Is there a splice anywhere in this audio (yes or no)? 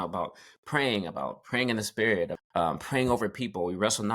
yes